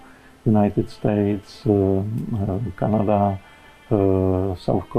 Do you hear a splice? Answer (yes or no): no